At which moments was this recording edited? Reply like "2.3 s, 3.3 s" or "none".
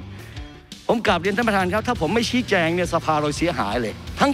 none